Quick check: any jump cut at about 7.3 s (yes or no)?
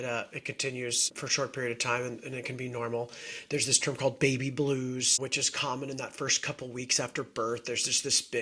no